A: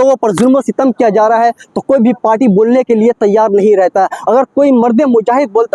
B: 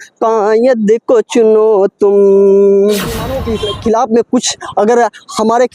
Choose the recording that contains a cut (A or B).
B